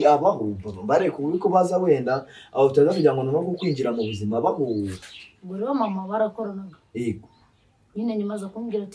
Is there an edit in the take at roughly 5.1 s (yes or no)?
yes